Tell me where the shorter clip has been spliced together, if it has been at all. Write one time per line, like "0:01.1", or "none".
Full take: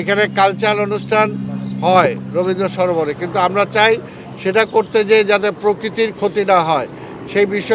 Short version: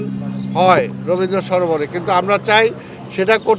none

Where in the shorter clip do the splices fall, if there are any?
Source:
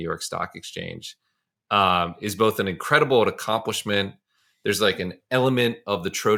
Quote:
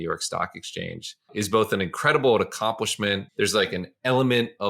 0:01.3
0:03.3

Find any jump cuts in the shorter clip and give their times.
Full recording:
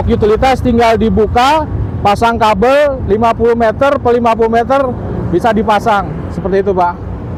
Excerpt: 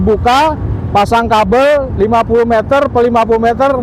none

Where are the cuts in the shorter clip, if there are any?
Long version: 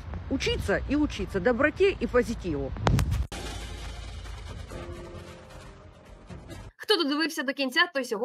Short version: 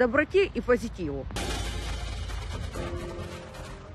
0:01.3

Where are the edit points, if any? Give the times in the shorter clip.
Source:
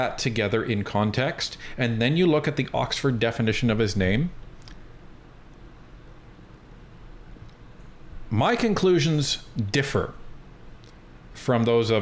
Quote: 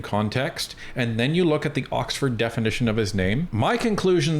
0:03.5

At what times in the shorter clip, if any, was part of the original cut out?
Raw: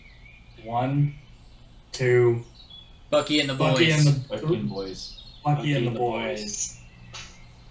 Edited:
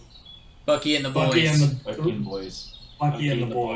none

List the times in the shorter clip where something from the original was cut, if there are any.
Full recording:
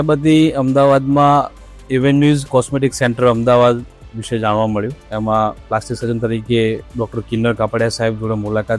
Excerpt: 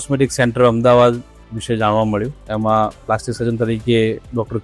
none

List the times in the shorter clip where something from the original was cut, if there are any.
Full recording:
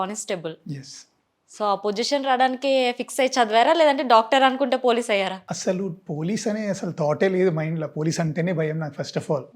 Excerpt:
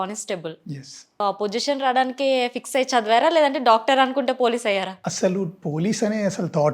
0:01.2

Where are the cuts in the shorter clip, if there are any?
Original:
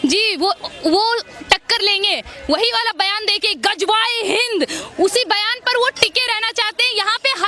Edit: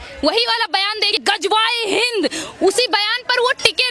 0:01.2

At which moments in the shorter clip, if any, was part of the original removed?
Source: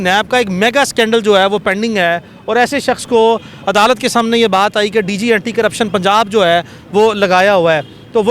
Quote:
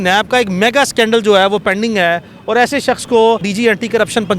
0:03.5

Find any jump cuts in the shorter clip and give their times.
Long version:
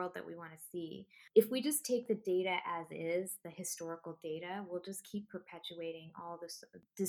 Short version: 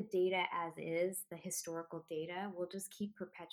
none

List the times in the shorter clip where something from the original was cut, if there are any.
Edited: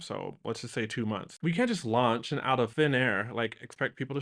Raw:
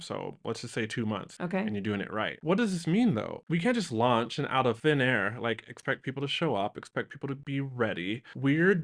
0:01.3

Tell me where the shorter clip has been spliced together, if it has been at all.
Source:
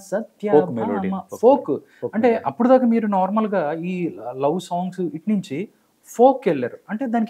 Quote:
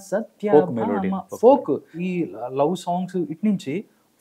0:02.0

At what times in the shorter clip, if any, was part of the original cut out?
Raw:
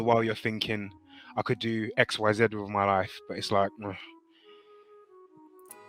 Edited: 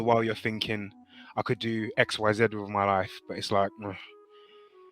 0:04.0

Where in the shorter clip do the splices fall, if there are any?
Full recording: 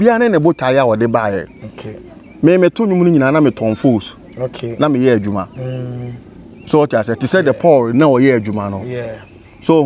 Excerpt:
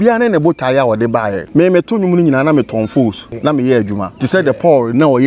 0:01.4
0:03.3
0:04.1

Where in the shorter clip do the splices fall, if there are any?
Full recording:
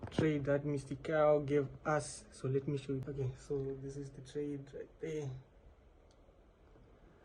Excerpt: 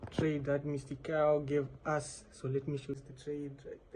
0:03.0

